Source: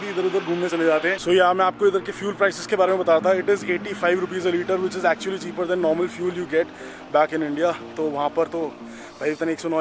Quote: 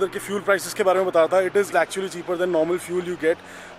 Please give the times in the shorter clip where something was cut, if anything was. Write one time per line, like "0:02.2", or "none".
0:01.7